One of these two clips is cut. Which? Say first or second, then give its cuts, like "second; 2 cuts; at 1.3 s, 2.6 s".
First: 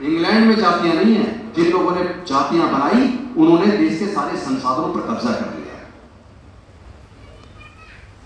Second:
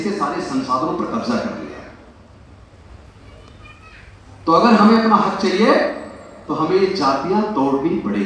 first; 1 cut; at 1.5 s